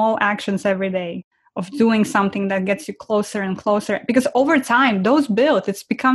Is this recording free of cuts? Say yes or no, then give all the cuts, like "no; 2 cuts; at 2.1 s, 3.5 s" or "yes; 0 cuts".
no; 1 cut; at 1.3 s